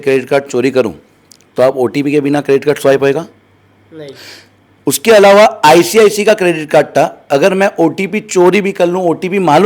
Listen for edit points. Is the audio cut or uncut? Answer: uncut